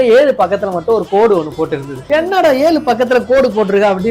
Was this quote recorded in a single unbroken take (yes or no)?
yes